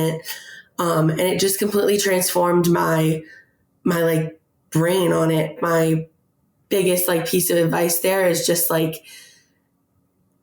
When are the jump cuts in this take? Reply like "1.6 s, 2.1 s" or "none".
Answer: 5.6 s